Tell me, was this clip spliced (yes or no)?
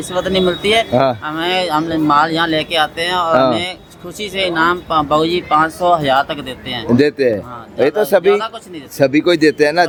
no